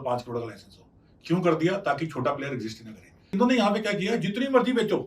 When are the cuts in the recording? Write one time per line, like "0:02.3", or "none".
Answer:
0:03.3

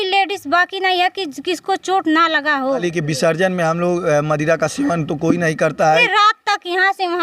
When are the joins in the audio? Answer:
0:02.8
0:06.1

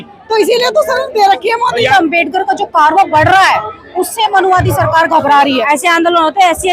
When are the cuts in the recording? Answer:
0:01.9
0:05.6

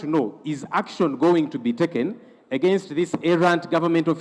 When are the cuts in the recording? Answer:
none

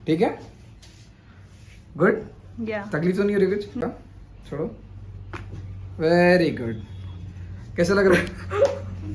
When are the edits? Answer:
0:03.8

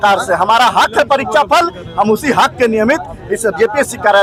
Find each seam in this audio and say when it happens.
none

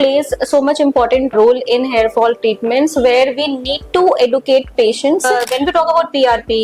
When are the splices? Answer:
0:05.3

